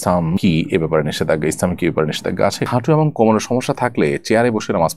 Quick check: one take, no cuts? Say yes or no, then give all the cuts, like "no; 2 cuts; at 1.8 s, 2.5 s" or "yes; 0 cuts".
no; 1 cut; at 2.7 s